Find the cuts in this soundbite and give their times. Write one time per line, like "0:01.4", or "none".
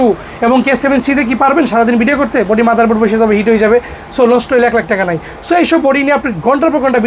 none